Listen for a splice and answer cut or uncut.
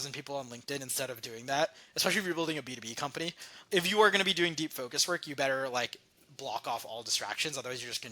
cut